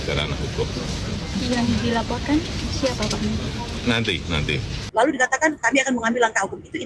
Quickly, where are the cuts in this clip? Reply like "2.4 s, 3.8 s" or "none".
4.8 s